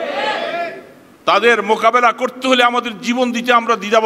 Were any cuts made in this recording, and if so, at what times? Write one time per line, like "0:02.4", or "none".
none